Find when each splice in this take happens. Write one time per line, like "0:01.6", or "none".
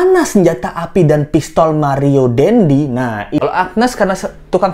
0:03.4

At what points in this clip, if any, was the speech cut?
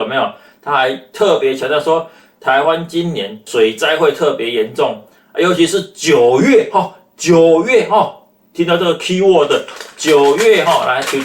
0:03.5

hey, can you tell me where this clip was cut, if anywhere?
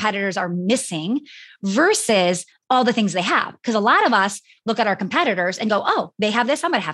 none

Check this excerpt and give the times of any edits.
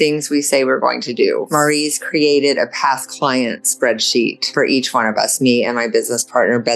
0:01.5
0:04.4

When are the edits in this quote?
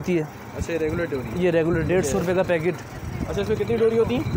none

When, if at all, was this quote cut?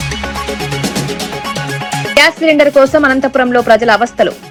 none

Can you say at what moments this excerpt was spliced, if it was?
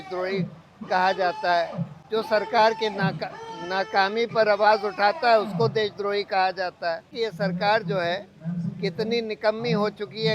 0:07.1

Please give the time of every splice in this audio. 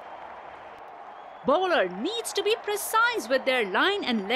0:01.4

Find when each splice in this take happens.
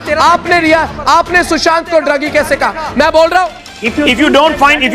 0:03.6

